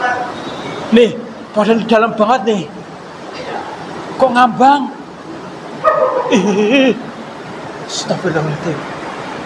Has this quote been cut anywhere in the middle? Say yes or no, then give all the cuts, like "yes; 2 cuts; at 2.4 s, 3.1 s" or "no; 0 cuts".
no; 0 cuts